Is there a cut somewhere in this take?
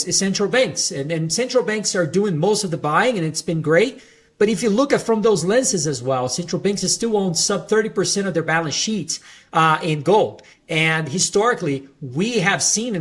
no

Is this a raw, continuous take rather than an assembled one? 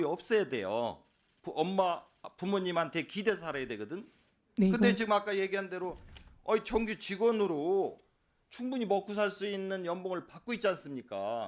yes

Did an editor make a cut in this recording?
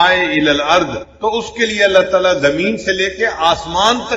yes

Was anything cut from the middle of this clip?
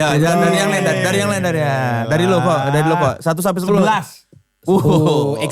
no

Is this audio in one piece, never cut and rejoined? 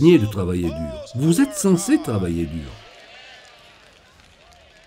no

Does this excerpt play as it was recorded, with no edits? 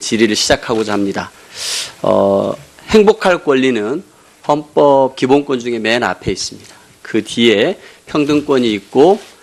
no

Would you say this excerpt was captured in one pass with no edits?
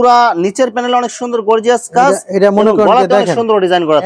yes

